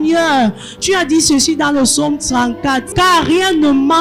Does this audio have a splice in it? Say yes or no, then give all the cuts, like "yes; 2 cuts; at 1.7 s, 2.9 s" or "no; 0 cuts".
yes; 1 cut; at 2.9 s